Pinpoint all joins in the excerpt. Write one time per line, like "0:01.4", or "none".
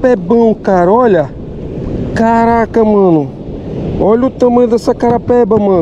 none